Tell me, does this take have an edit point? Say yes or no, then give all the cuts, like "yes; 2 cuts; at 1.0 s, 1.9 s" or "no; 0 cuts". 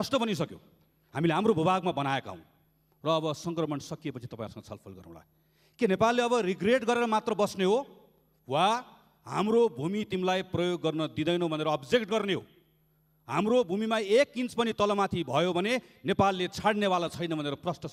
no; 0 cuts